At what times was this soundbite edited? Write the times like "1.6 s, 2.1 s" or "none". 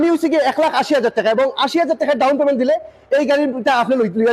none